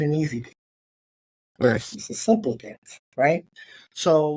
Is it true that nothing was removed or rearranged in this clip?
yes; 0 cuts

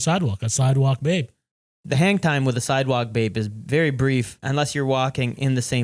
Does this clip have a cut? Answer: yes; 2 cuts; at 1.7 s, 4.4 s

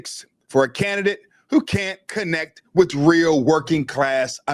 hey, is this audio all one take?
yes; 0 cuts

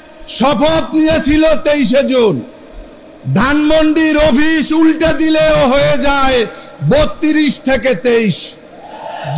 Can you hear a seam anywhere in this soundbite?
no; 0 cuts

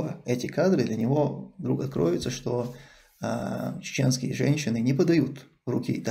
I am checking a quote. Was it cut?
no; 0 cuts

